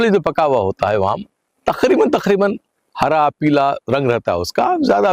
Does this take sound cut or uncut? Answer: uncut